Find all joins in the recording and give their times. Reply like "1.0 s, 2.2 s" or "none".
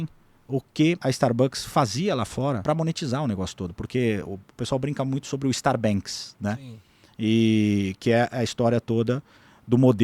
1.0 s, 2.6 s